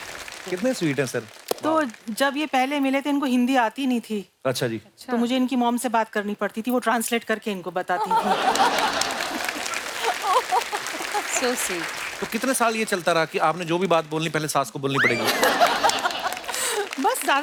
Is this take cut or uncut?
uncut